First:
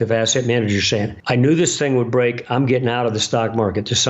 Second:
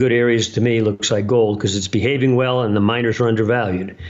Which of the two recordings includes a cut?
first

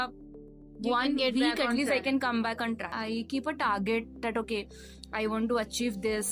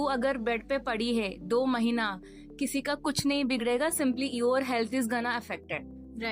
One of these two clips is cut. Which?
first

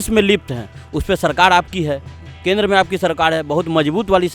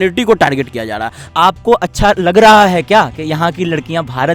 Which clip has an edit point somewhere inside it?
second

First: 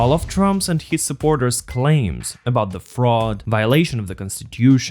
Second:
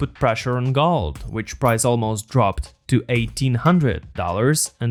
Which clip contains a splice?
first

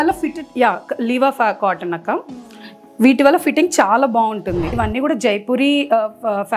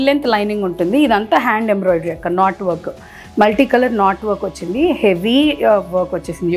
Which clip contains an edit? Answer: first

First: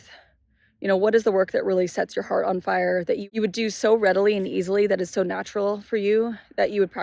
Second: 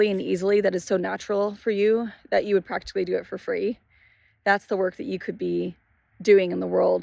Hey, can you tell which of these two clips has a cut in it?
first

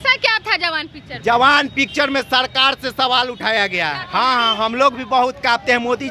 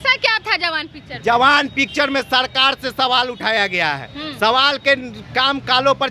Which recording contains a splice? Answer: first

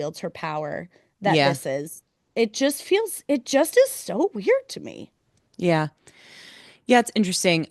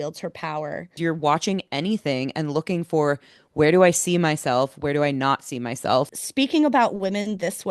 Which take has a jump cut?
second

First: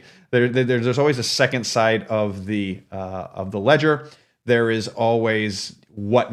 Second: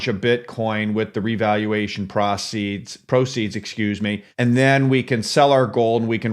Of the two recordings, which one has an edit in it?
second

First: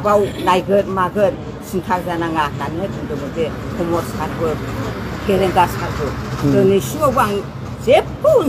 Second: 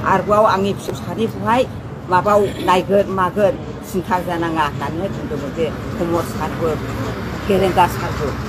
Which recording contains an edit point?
second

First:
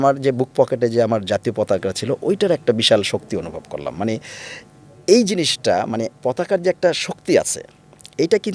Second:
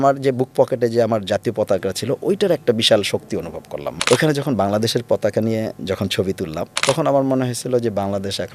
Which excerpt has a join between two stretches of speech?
second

